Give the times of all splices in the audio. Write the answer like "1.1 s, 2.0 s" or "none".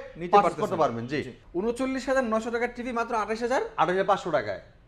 1.3 s

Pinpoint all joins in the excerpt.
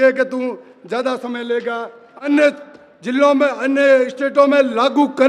2.1 s

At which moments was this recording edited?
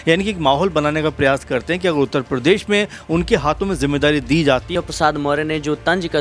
4.7 s

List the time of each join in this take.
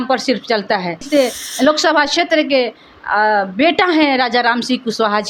1.1 s

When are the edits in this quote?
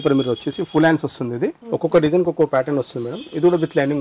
1.6 s

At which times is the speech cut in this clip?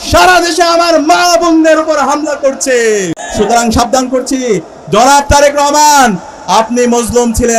3.2 s

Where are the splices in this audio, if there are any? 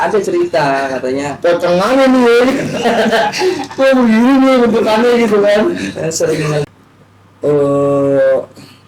6.6 s

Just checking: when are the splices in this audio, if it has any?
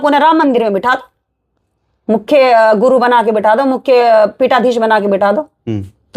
none

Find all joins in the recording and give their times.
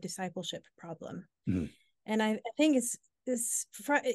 none

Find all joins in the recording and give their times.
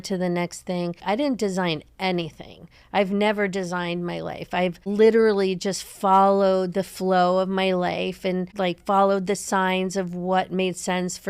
1.0 s

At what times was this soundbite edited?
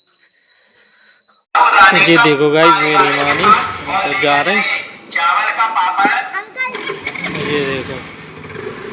1.3 s

